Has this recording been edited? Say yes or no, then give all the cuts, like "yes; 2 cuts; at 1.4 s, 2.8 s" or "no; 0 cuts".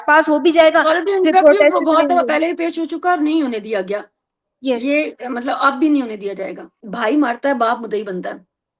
yes; 1 cut; at 6.8 s